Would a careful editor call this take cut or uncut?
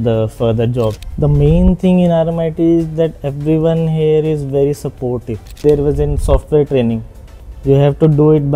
cut